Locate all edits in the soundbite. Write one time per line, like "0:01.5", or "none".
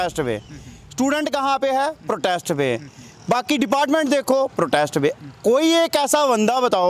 none